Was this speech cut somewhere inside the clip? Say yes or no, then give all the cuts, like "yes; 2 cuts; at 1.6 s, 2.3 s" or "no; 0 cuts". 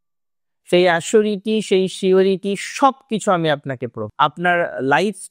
yes; 1 cut; at 4.0 s